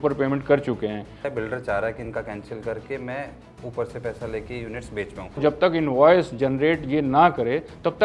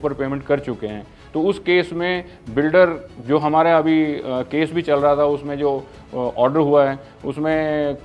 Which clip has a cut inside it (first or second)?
first